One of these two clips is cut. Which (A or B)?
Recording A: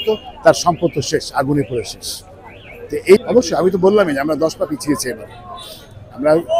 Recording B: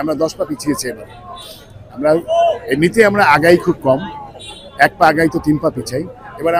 A